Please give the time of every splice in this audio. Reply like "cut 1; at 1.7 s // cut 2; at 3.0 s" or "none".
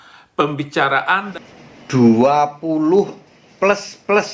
cut 1; at 1.3 s

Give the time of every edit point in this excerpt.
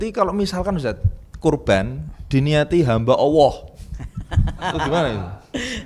none

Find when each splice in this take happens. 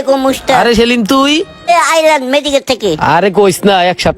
cut 1; at 1.7 s

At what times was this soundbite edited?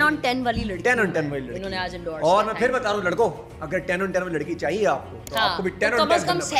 none

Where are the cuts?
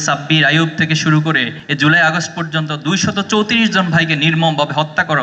none

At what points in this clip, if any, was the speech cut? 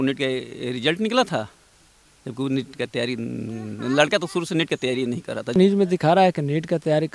cut 1; at 5.5 s

